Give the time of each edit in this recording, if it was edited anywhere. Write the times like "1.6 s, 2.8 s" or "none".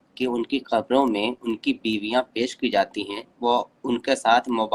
none

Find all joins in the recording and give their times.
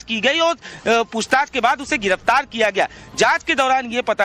2.7 s

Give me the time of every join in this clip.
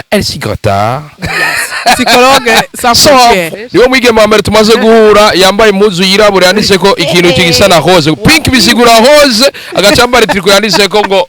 3.5 s

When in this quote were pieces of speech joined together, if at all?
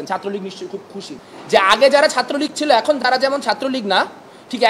1.2 s

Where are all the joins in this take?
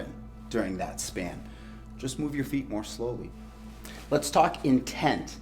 3.3 s

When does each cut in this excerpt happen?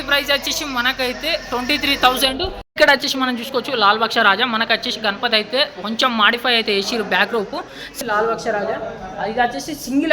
2.7 s, 7.9 s

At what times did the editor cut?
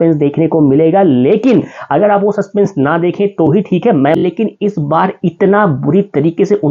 4.2 s

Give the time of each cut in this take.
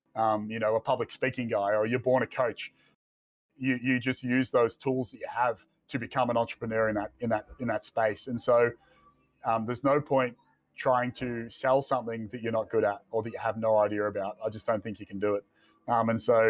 none

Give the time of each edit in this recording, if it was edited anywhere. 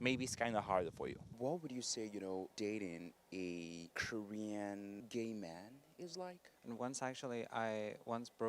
1.2 s, 6.5 s

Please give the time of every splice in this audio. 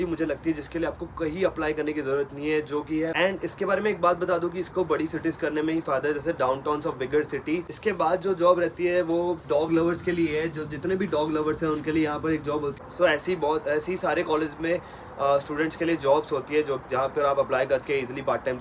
3.1 s, 7.7 s, 12.7 s

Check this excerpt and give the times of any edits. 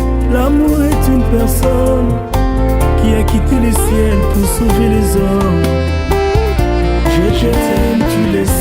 1.2 s

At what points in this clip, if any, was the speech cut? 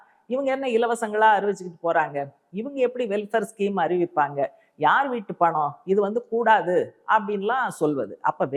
none

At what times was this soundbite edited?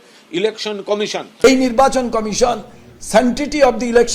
1.4 s

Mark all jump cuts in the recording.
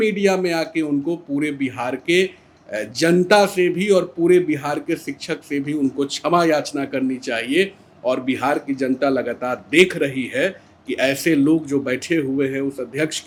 none

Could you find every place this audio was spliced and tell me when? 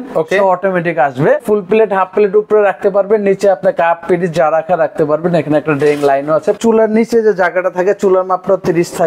1.4 s, 6.6 s

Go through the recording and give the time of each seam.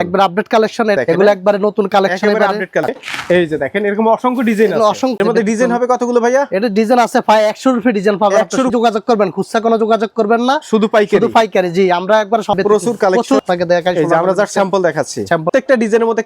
1.0 s, 2.9 s, 5.2 s, 8.7 s, 12.6 s, 15.5 s

